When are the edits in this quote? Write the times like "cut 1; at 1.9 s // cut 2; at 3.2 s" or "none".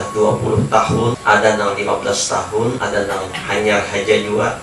cut 1; at 1.2 s // cut 2; at 2.8 s